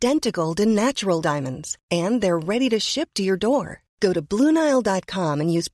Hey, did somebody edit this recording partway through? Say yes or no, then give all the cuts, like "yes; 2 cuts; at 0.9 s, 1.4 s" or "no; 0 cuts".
no; 0 cuts